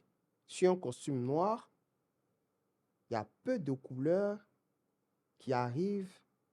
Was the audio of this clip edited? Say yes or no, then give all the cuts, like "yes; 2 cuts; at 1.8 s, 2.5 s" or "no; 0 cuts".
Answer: no; 0 cuts